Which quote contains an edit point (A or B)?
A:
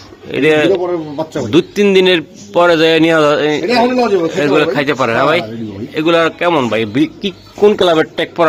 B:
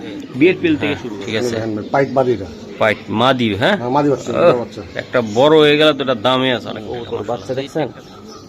B